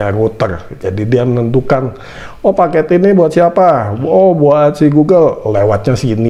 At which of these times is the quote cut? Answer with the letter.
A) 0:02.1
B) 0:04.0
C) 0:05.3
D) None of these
D